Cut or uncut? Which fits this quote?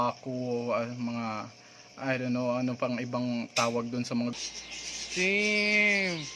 cut